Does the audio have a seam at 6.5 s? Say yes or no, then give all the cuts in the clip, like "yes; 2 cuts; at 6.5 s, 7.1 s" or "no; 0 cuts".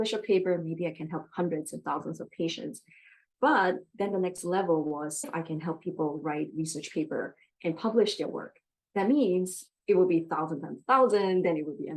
no; 1 cut; at 5.3 s